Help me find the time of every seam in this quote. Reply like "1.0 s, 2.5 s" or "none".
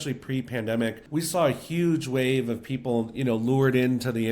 1.0 s